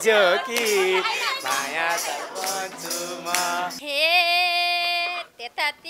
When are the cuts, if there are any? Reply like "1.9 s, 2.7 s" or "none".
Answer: 3.8 s